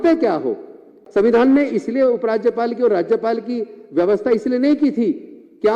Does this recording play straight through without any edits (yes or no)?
no